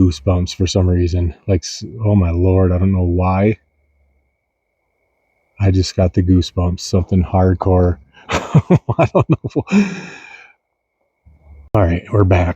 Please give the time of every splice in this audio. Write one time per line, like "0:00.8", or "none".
0:11.6